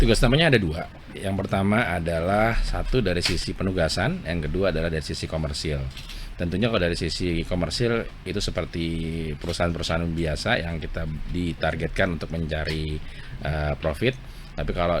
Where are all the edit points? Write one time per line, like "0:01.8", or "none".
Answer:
none